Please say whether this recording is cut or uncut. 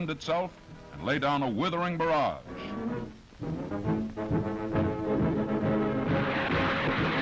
cut